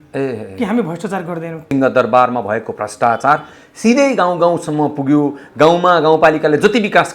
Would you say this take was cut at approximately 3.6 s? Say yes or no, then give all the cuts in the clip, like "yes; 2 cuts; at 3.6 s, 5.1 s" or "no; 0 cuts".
no; 1 cut; at 1.6 s